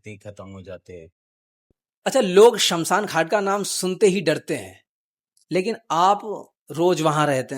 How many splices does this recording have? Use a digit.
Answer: 1